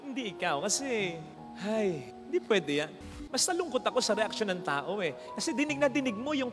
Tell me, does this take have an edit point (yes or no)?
yes